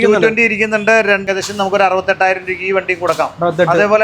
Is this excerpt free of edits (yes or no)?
no